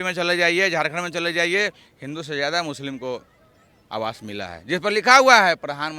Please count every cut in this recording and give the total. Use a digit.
0